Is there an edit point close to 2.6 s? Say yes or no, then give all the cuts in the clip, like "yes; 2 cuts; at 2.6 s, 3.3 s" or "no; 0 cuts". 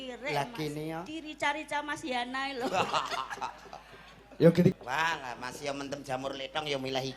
no; 1 cut; at 4.7 s